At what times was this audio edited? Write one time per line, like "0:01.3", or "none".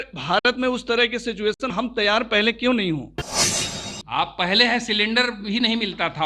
0:03.4